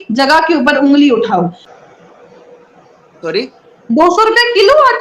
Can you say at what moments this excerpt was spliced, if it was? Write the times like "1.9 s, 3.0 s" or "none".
1.6 s